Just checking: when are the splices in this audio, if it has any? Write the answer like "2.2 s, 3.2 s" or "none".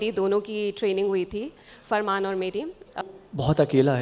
3.0 s

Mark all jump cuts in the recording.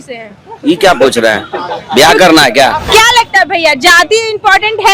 2.8 s

